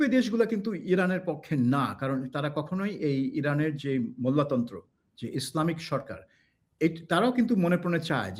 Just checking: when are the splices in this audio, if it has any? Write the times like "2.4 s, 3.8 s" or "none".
none